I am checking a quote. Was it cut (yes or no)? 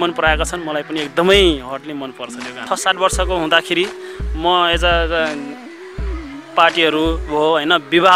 yes